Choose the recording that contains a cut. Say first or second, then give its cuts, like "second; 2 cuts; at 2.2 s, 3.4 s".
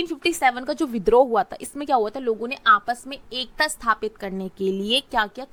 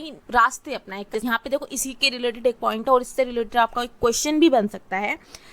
second; 1 cut; at 1.2 s